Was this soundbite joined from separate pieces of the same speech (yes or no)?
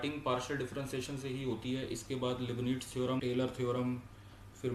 yes